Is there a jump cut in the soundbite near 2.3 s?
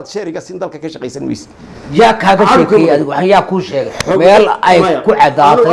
no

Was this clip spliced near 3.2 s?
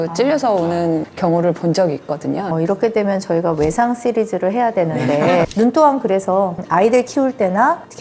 no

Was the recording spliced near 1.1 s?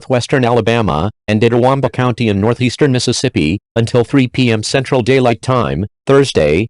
yes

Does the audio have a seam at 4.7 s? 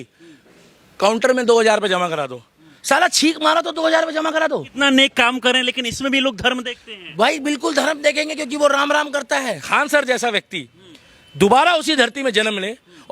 yes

